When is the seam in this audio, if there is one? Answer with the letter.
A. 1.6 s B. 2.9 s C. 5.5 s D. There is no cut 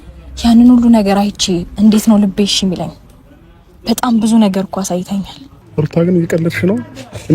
C